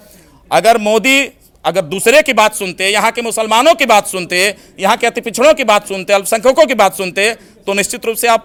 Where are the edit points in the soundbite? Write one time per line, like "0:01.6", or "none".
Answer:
none